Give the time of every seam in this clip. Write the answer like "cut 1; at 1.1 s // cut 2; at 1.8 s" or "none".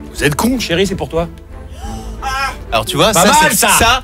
cut 1; at 2.6 s